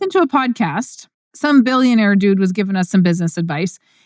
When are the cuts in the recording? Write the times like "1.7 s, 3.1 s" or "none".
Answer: 1.3 s